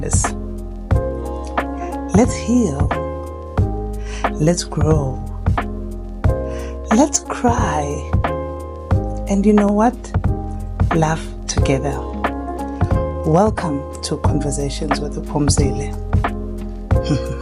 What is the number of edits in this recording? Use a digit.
0